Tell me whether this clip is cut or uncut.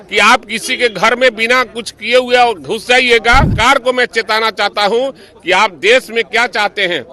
cut